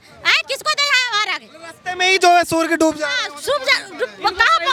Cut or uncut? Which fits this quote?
uncut